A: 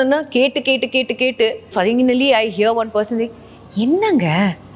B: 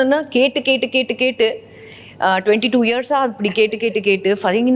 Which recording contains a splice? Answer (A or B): A